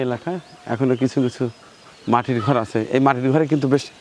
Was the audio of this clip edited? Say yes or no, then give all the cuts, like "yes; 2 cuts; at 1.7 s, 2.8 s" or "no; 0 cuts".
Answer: no; 0 cuts